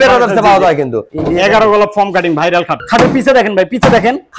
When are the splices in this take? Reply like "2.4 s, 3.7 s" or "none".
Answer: 1.1 s, 2.8 s